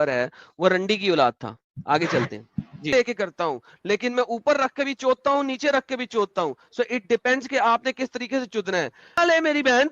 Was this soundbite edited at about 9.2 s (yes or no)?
yes